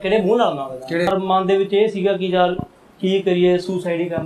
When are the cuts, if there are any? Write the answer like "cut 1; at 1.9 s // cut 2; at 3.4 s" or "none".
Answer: cut 1; at 1.1 s